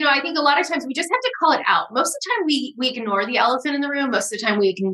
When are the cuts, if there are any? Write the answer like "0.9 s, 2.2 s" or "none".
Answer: none